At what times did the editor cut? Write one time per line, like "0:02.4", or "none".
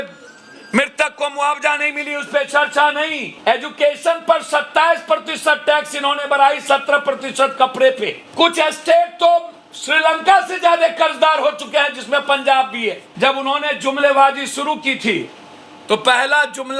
0:03.2
0:08.2
0:13.1